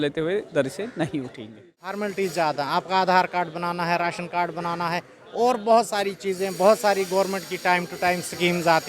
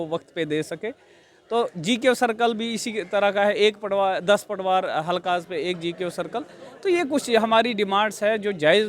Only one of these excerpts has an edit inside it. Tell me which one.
first; 1 cut; at 2.0 s

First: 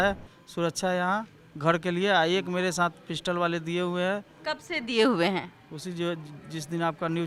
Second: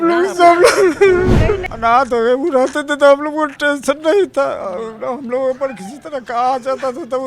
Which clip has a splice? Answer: second; 1 cut; at 1.7 s

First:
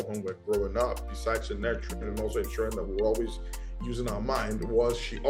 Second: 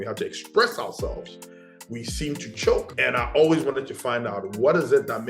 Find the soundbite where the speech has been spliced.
second; 1 cut; at 2.9 s

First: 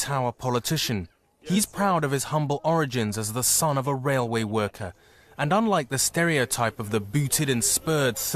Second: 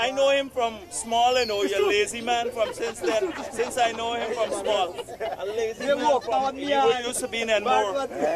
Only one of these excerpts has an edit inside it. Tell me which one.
first; 1 cut; at 3.9 s

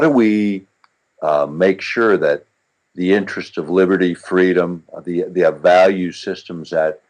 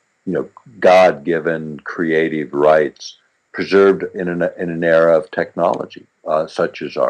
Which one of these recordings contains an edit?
second; 1 cut; at 5.5 s

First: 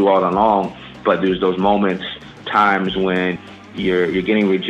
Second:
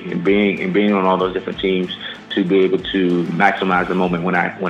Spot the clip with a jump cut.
first; 3 cuts; at 0.9 s, 2.4 s, 3.6 s

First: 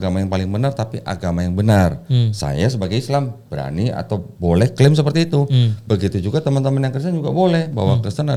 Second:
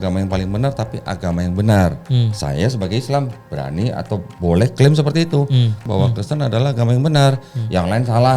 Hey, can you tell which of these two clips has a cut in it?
second; 1 cut; at 5.8 s

